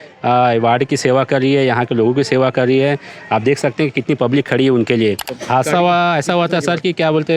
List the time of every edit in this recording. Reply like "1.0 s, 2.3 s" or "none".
5.3 s